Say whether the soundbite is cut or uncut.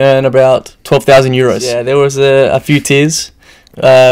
cut